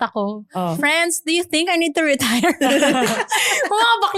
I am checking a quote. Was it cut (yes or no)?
no